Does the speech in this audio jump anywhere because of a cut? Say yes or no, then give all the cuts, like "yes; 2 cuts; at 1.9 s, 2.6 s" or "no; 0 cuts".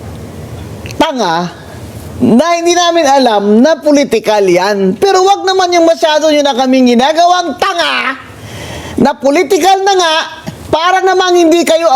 no; 0 cuts